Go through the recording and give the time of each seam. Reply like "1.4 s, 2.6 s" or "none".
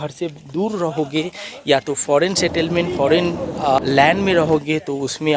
3.8 s

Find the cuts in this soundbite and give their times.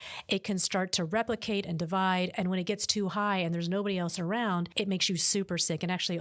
4.7 s

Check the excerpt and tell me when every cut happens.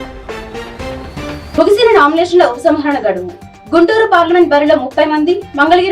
1.6 s

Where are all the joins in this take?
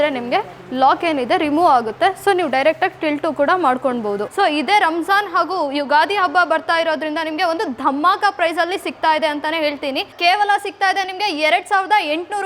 4.3 s, 10.1 s

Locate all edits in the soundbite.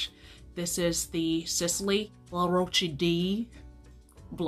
2.2 s

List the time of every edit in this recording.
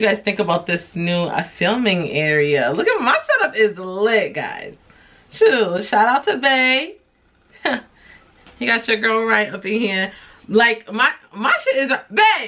none

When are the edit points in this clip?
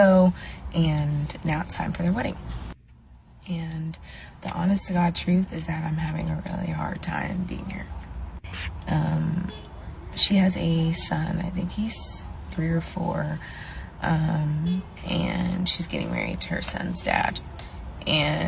3.0 s, 7.9 s, 13.4 s

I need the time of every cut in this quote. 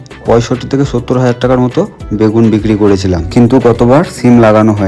none

